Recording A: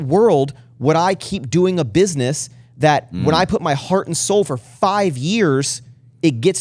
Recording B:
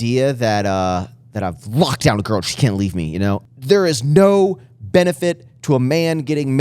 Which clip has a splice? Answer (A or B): B